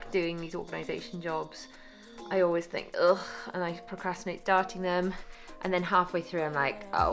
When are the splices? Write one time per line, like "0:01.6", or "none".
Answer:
none